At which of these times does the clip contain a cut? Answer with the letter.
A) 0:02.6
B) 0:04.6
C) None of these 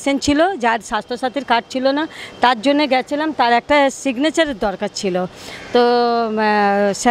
C